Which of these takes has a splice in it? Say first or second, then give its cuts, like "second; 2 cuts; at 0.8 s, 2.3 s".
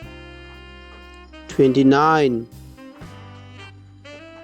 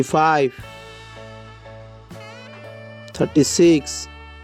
first; 1 cut; at 1.0 s